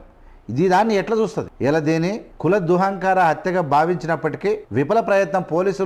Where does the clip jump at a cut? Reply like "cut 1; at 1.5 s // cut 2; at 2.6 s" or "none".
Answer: cut 1; at 1.5 s // cut 2; at 2.3 s // cut 3; at 4.6 s